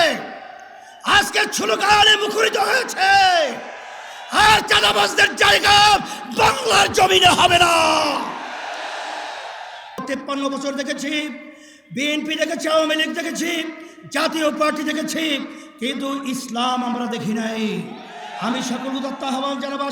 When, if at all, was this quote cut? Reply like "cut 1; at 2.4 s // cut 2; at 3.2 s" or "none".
cut 1; at 10.0 s